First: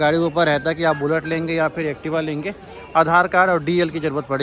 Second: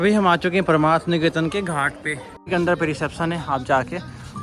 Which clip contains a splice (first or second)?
second